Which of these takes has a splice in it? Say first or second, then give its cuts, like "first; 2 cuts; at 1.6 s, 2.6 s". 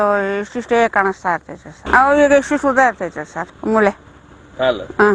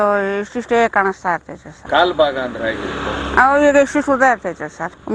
first; 1 cut; at 1.7 s